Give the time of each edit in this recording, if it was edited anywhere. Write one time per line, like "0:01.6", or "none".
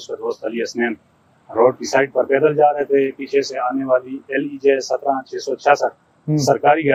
none